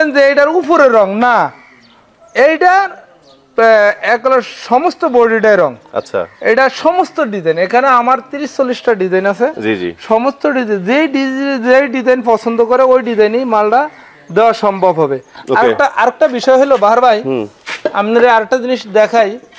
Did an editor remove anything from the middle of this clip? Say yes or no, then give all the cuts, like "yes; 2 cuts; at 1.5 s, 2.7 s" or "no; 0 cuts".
no; 0 cuts